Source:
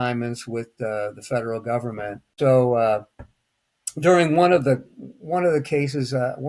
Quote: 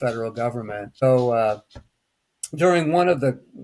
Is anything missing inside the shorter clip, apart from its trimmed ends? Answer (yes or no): yes